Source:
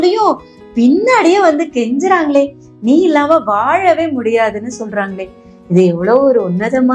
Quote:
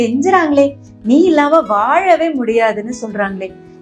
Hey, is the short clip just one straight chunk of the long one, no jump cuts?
yes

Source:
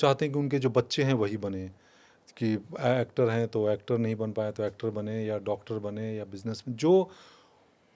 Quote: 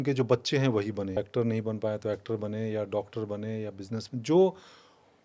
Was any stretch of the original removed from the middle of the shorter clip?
yes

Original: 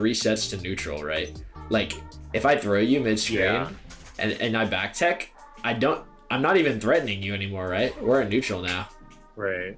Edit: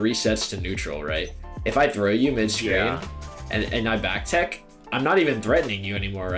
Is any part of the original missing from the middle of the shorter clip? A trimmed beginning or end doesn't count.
yes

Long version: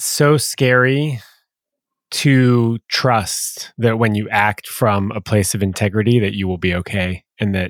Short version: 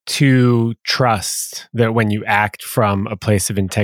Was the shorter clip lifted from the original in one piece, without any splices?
yes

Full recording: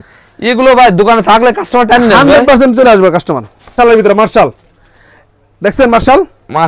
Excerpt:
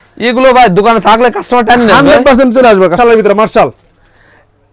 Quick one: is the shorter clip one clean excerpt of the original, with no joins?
no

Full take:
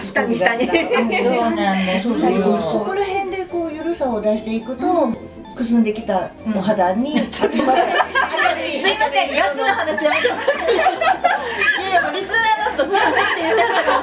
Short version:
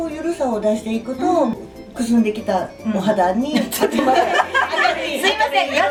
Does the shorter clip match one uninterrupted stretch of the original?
yes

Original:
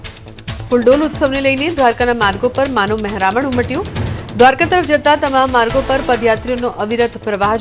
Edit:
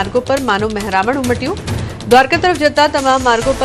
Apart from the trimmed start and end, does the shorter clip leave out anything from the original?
no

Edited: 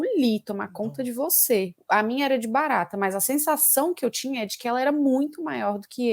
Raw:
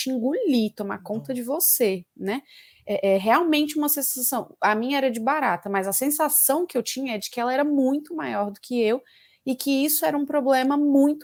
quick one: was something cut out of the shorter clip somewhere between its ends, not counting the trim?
yes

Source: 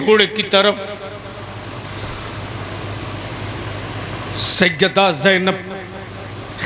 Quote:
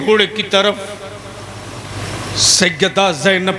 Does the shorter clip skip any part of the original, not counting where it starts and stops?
yes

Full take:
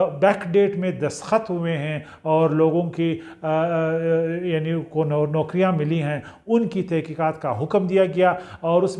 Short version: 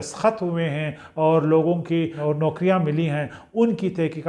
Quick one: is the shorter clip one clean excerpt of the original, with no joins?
no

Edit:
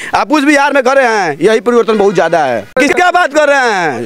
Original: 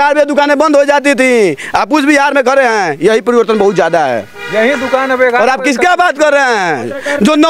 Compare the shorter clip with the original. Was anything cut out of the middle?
yes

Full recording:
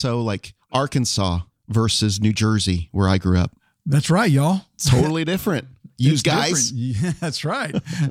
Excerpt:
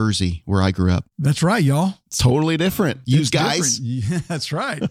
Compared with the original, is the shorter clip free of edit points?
no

